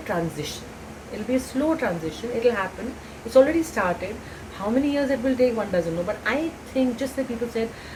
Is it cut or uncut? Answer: uncut